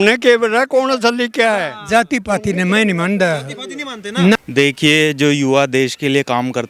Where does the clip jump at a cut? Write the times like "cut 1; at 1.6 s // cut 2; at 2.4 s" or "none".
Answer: cut 1; at 4.4 s

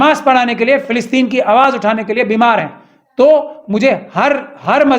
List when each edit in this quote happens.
none

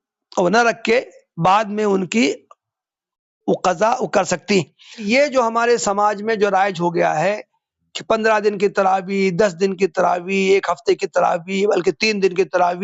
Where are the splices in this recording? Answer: cut 1; at 5.0 s

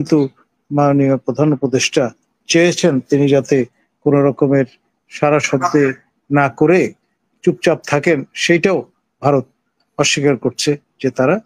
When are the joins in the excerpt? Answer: none

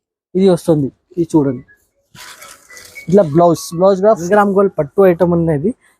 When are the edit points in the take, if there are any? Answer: cut 1; at 4.2 s

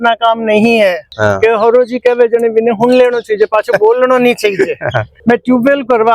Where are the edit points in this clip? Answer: cut 1; at 1.1 s // cut 2; at 5.0 s

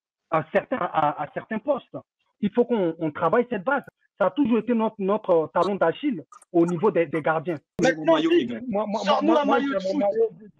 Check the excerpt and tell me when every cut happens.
cut 1; at 2.2 s // cut 2; at 3.9 s // cut 3; at 7.8 s

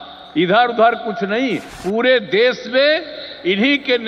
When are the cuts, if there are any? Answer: cut 1; at 1.7 s

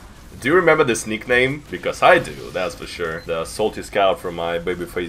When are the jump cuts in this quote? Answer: cut 1; at 1.7 s // cut 2; at 3.2 s

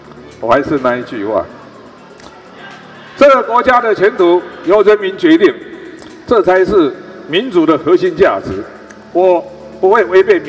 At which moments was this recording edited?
none

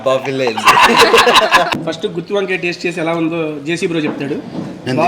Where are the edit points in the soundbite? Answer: cut 1; at 1.7 s

